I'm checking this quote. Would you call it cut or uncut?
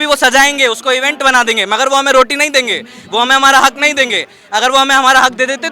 uncut